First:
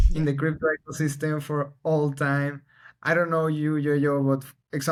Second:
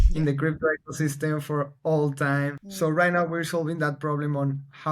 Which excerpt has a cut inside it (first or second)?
second